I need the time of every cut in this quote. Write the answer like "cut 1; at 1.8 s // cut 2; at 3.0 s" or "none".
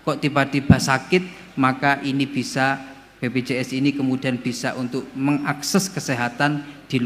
none